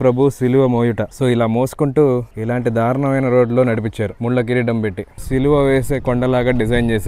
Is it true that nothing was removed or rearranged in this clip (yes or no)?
no